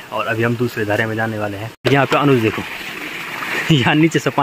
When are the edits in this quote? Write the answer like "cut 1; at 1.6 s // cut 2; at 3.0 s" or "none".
cut 1; at 1.6 s